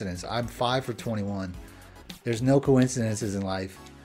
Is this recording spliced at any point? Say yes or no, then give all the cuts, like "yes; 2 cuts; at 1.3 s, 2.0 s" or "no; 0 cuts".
no; 0 cuts